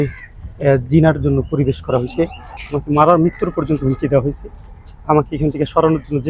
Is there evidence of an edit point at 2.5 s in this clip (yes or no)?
yes